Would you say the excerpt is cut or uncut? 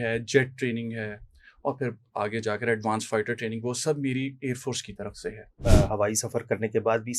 cut